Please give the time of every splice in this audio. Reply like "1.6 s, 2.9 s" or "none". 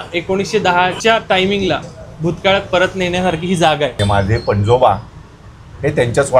1.0 s, 4.0 s